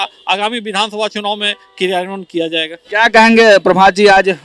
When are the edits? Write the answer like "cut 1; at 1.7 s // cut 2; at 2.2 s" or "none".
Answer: none